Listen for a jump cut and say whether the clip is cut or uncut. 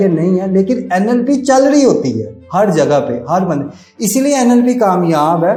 uncut